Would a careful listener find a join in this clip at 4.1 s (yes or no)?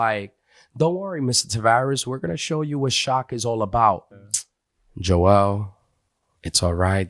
yes